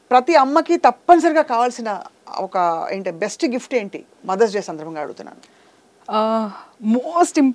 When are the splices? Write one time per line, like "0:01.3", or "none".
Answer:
none